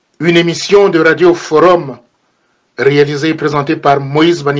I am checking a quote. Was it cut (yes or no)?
no